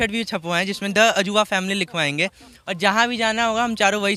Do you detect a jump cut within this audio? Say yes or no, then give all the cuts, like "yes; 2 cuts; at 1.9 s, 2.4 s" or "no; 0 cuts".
no; 0 cuts